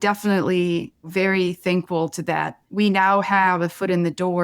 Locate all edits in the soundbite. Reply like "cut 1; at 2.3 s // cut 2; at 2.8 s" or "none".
cut 1; at 1.1 s // cut 2; at 2.6 s